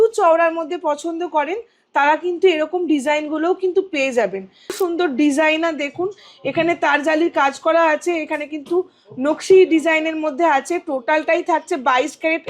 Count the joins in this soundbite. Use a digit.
1